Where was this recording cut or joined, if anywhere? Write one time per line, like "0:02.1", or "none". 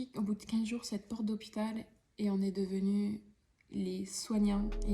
none